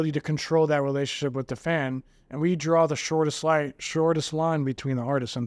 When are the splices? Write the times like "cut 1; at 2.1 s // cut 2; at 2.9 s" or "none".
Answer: none